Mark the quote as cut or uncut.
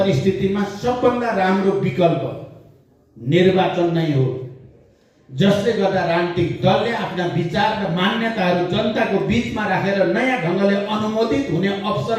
uncut